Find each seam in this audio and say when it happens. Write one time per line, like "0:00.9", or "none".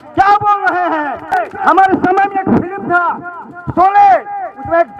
0:01.2